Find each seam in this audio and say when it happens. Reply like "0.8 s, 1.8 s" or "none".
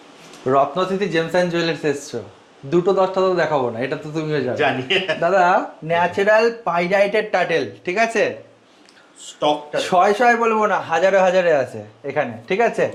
none